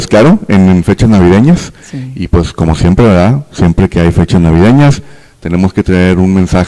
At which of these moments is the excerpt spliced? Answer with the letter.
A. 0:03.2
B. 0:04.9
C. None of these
C